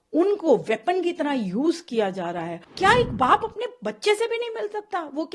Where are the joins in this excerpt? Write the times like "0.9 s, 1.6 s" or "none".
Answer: 2.6 s